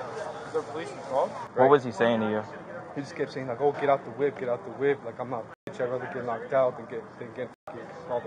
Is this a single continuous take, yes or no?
no